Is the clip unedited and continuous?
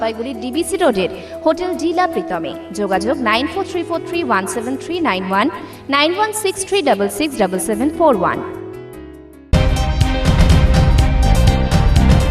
no; 1 cut; at 9.5 s

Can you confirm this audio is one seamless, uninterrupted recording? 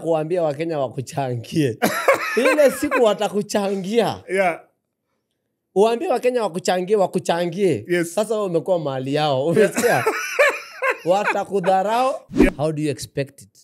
no; 1 cut; at 12.5 s

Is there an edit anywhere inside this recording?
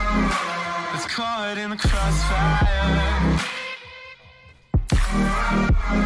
yes; 1 cut; at 0.9 s

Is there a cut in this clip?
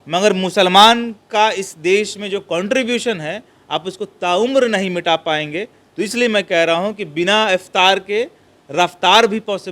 no; 0 cuts

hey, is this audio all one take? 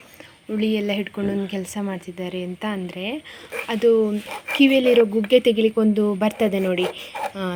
yes; 0 cuts

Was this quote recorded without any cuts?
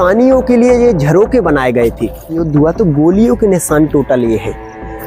no; 1 cut; at 2.4 s

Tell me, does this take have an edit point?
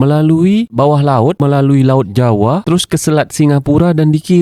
no; 0 cuts

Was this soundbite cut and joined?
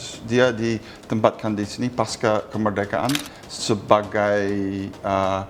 no; 0 cuts

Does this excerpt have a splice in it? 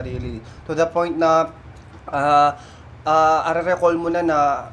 no; 0 cuts

